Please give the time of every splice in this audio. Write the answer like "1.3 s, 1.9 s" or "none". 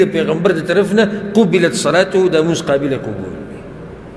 none